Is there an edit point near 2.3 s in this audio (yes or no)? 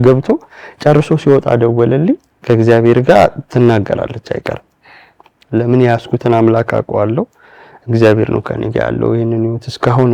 yes